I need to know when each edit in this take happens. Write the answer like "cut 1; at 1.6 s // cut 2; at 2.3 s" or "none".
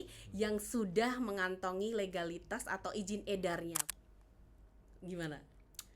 cut 1; at 3.8 s